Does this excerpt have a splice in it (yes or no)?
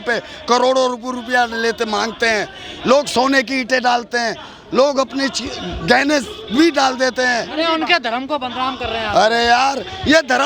no